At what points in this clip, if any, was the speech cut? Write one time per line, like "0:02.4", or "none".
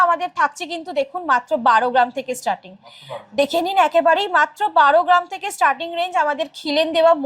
none

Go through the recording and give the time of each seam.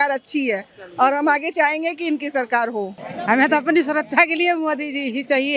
0:02.9

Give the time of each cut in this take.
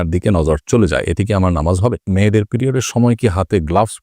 0:02.1

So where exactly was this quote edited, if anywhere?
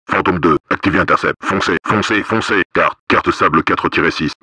0:01.4
0:02.7

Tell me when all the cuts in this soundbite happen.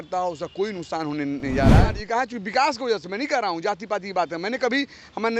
0:01.9

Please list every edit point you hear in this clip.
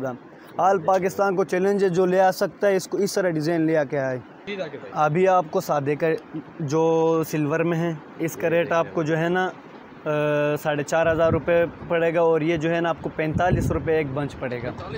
none

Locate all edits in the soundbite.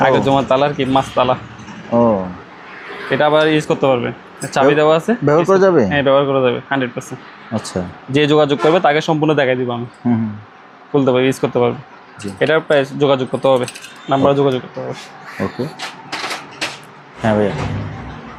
none

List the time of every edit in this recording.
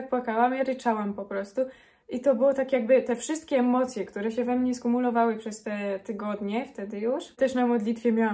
0:07.4

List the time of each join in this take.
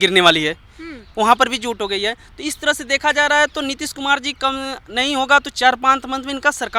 none

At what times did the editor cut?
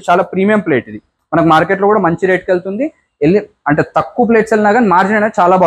none

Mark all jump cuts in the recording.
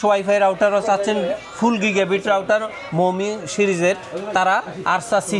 none

